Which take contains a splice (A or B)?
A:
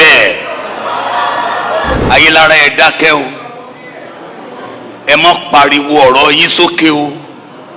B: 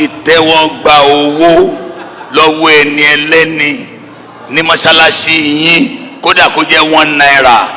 A